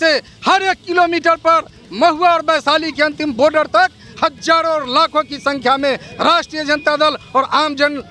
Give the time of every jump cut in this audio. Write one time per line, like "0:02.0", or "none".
none